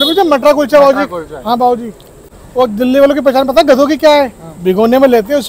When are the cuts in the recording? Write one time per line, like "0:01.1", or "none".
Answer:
0:02.3